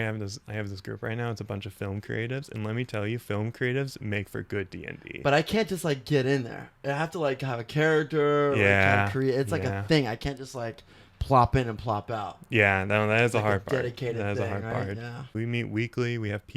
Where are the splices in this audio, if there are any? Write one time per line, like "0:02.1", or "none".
0:15.3